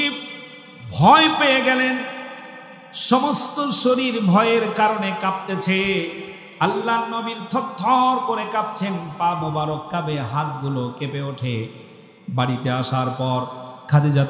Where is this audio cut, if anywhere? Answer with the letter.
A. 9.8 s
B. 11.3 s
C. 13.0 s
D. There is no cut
D